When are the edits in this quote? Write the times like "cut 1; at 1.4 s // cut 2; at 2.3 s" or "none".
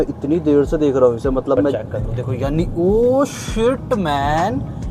cut 1; at 1.7 s